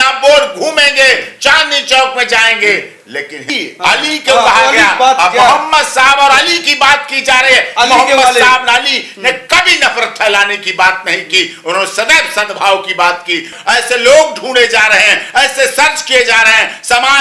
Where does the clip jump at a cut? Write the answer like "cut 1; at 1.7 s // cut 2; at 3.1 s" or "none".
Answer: cut 1; at 3.5 s // cut 2; at 13.5 s